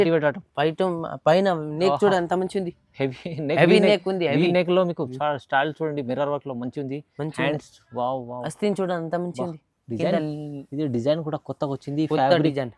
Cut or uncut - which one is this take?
uncut